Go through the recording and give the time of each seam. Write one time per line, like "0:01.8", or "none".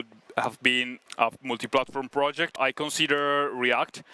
0:01.0
0:02.6